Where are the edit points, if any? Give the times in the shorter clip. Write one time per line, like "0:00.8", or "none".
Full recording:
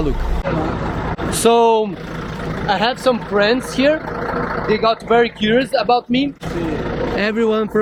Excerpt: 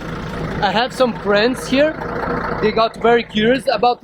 none